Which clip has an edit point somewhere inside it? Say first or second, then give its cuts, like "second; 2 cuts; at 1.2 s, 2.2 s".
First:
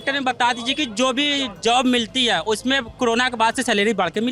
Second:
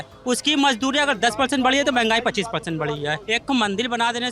second; 1 cut; at 3.2 s